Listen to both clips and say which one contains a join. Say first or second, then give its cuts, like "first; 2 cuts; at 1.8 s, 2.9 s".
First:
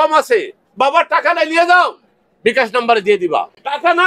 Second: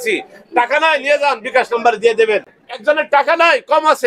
second; 1 cut; at 2.5 s